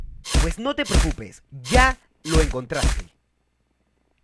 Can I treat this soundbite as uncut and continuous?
yes; 0 cuts

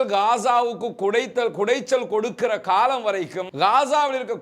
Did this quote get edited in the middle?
no; 0 cuts

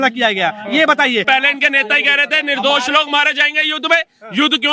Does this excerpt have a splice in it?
yes; 1 cut; at 1.2 s

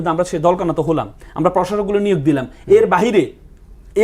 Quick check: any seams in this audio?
no; 0 cuts

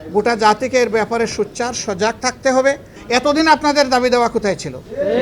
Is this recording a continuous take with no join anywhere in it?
no; 1 cut; at 2.9 s

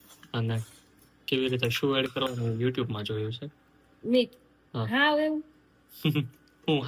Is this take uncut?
yes; 0 cuts

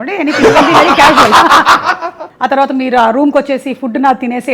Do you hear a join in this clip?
yes; 1 cut; at 2.2 s

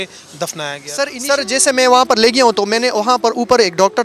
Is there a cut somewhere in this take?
yes; 1 cut; at 1.1 s

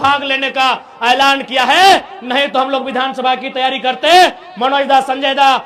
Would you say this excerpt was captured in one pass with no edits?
yes; 0 cuts

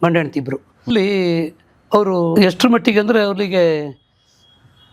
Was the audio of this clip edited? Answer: yes; 2 cuts; at 0.9 s, 2.3 s

